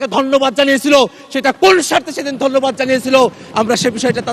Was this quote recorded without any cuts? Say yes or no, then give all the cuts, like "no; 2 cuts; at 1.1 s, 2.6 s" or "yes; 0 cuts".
yes; 0 cuts